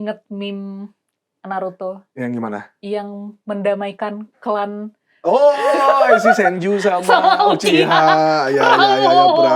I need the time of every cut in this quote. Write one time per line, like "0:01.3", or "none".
none